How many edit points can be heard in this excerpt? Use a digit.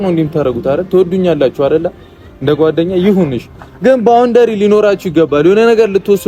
0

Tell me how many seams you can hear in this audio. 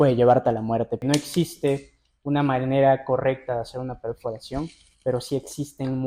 1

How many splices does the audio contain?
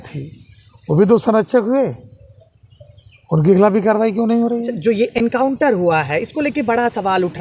0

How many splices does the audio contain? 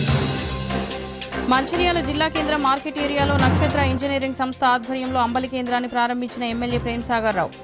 1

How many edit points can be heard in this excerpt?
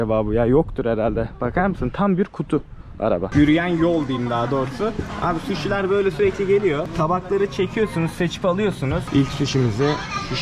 2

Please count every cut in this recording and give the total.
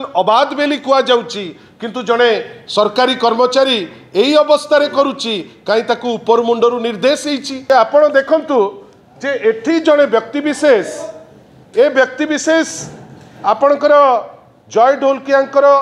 1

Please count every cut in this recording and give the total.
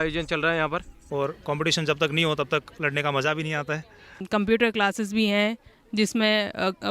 2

